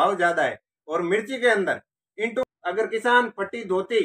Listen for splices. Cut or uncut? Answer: cut